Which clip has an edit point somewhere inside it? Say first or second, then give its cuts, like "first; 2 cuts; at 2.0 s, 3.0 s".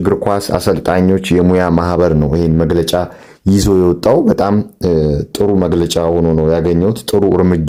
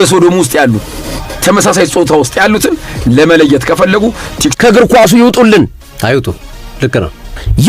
second; 1 cut; at 4.5 s